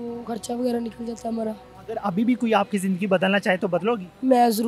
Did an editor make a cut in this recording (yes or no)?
yes